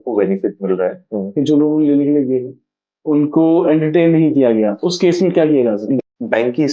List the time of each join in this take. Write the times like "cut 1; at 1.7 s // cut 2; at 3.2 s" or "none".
cut 1; at 1.1 s // cut 2; at 6.0 s

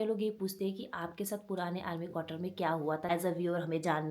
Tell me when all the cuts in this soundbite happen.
cut 1; at 3.1 s

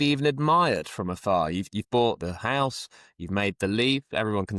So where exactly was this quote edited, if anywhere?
none

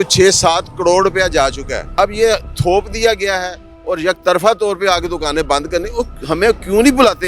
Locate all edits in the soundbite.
cut 1; at 1.8 s

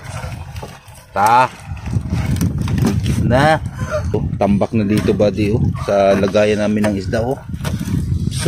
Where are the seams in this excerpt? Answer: cut 1; at 4.2 s

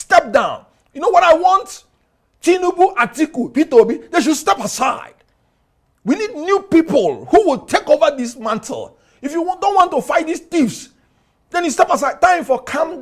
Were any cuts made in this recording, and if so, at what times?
none

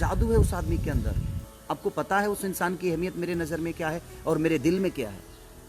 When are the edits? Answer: cut 1; at 1.4 s

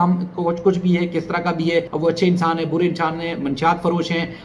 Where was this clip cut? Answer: cut 1; at 1.9 s

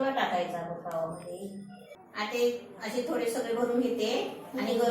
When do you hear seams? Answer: cut 1; at 2.0 s

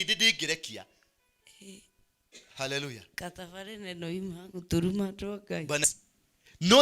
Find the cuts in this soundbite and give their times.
cut 1; at 5.8 s

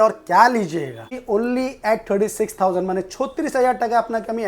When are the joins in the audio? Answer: cut 1; at 1.1 s

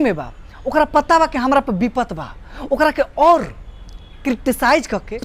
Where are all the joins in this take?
none

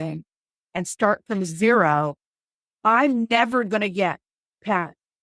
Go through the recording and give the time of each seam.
none

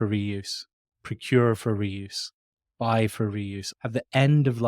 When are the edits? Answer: cut 1; at 0.9 s // cut 2; at 3.7 s

